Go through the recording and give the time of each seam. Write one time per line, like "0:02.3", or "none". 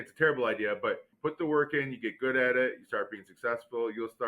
0:01.1

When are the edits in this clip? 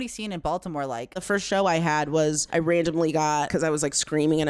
0:01.1
0:03.5

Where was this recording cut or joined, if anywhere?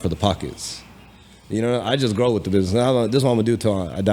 none

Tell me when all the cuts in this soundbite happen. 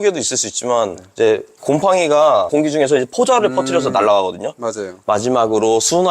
0:01.5
0:02.5
0:04.9

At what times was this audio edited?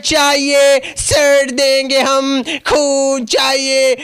none

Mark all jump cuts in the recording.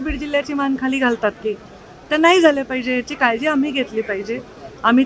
none

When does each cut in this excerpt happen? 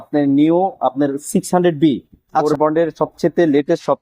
0:02.4

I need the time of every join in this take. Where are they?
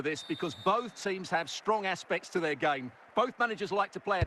none

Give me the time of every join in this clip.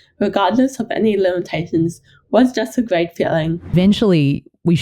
0:03.7

